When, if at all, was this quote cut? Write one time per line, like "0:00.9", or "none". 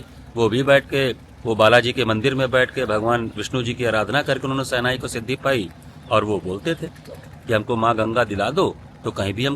none